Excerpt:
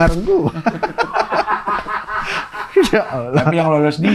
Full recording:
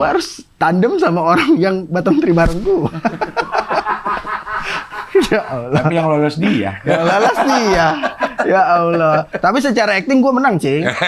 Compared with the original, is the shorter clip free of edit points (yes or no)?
yes